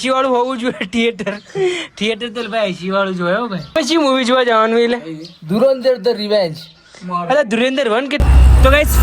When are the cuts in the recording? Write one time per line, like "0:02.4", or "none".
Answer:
0:03.7
0:08.2